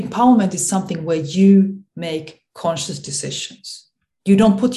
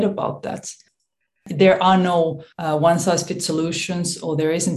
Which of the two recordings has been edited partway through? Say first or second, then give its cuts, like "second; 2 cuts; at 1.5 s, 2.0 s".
second; 2 cuts; at 1.3 s, 2.5 s